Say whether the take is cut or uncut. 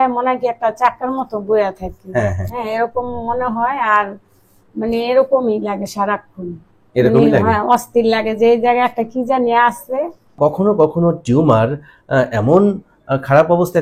cut